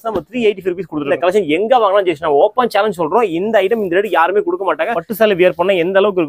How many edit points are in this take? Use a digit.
2